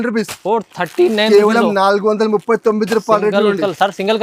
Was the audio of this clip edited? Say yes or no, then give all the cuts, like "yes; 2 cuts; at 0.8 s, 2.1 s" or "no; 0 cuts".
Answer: no; 0 cuts